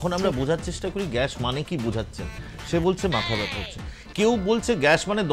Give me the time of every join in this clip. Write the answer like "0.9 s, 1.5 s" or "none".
none